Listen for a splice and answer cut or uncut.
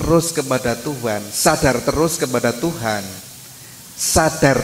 uncut